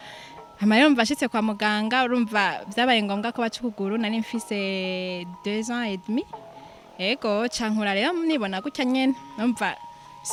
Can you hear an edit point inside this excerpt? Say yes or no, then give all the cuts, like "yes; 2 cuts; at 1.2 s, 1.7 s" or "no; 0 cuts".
no; 0 cuts